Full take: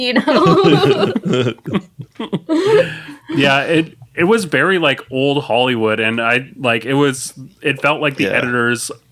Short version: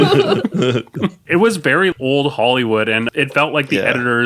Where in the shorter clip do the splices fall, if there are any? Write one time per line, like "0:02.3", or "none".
0:01.2
0:01.9
0:03.1